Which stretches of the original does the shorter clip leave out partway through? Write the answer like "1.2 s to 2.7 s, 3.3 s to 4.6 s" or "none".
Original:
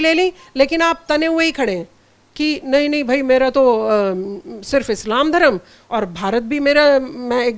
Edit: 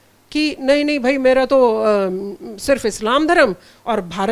none